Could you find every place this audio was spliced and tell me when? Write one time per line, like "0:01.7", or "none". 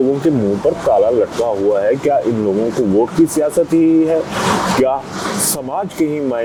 none